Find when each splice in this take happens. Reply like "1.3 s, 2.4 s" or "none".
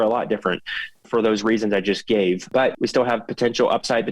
1.0 s, 2.5 s